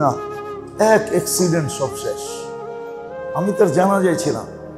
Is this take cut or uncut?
cut